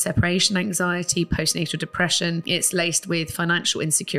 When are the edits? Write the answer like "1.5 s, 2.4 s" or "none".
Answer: 2.5 s